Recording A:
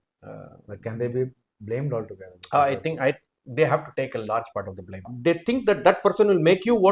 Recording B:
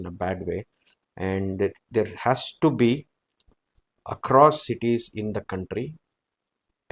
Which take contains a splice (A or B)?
A